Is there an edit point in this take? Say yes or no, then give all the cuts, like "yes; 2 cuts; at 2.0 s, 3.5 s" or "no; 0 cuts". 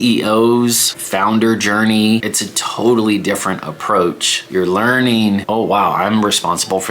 yes; 4 cuts; at 0.9 s, 2.4 s, 4.3 s, 5.4 s